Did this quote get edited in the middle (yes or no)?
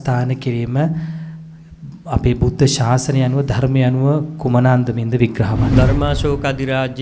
yes